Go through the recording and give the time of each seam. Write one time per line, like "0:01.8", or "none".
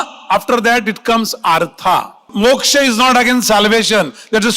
0:02.3